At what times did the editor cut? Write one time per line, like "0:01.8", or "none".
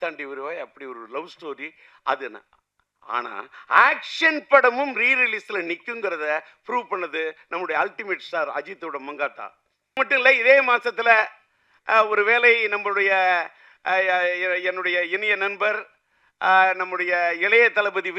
0:10.0

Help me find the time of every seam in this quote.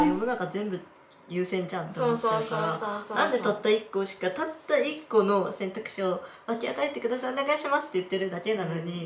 none

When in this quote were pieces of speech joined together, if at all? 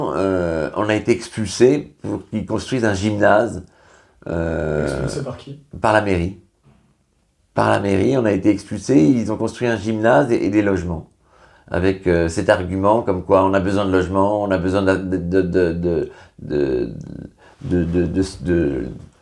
none

